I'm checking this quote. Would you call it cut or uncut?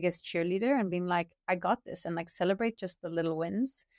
uncut